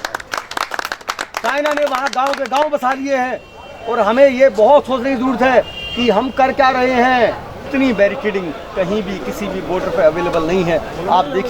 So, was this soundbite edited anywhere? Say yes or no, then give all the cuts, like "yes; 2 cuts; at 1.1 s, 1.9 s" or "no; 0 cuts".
yes; 1 cut; at 7.6 s